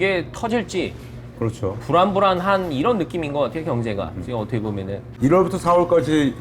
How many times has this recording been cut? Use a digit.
1